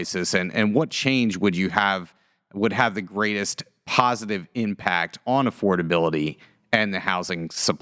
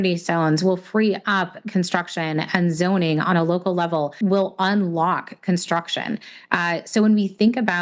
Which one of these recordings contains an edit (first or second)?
second